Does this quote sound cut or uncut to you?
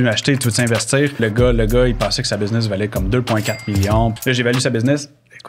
cut